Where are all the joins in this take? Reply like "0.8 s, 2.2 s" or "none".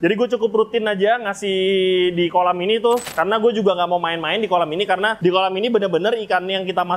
3.1 s, 5.2 s